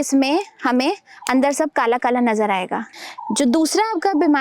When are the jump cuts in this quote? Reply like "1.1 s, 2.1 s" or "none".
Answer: 2.8 s